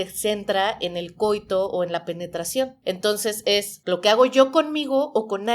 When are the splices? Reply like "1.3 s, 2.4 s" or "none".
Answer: 2.8 s, 3.7 s